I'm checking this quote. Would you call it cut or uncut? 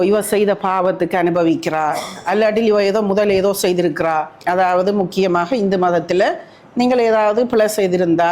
cut